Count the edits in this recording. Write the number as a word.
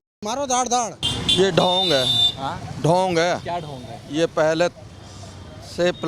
one